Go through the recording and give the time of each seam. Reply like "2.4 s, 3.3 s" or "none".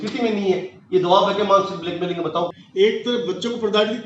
2.5 s